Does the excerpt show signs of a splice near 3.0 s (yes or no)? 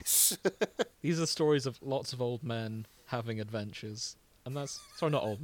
no